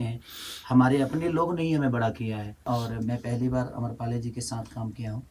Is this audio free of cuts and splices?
no; 1 cut; at 2.6 s

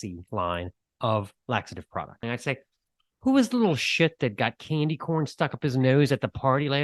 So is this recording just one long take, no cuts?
no; 1 cut; at 2.2 s

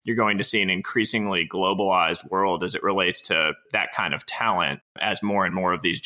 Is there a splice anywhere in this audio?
yes; 2 cuts; at 3.6 s, 4.9 s

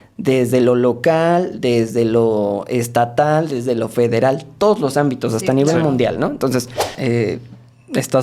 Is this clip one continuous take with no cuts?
no; 1 cut; at 6.9 s

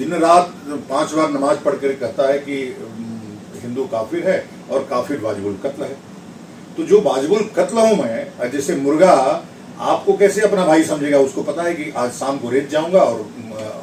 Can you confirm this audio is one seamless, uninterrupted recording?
yes; 0 cuts

